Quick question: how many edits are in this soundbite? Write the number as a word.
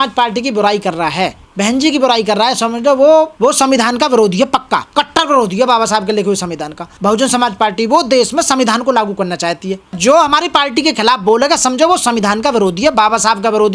five